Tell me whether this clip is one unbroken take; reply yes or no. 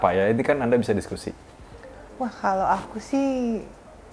yes